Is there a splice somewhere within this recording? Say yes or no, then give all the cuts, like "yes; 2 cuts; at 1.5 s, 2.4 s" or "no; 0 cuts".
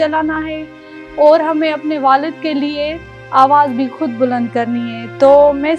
no; 0 cuts